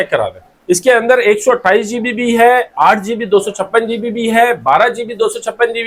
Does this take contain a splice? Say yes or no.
no